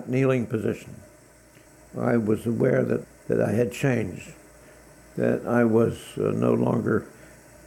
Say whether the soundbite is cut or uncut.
uncut